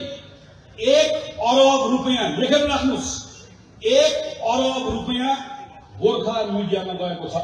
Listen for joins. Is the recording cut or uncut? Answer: uncut